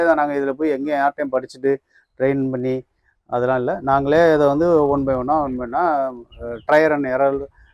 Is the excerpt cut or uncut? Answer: uncut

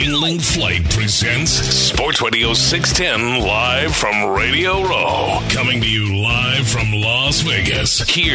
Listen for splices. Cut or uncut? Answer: uncut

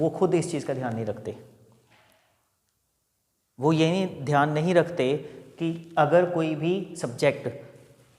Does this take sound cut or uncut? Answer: uncut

